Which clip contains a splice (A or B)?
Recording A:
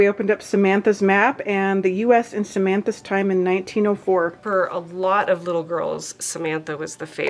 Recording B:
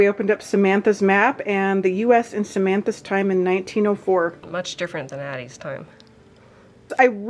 A